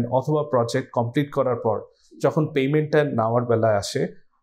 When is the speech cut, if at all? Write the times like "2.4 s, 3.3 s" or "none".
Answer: none